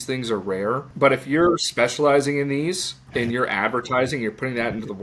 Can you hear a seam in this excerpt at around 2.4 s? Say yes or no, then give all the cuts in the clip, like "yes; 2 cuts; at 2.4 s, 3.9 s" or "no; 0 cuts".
no; 1 cut; at 0.9 s